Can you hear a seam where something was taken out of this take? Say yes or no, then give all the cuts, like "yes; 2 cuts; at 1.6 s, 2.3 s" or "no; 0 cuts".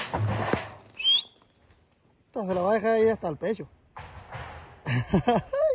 no; 0 cuts